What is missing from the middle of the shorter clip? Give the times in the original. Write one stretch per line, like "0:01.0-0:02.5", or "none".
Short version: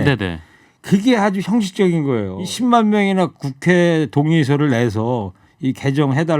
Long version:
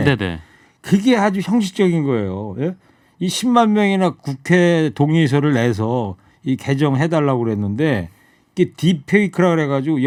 0:02.4-0:03.2